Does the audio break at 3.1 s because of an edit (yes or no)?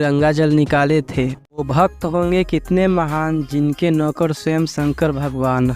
no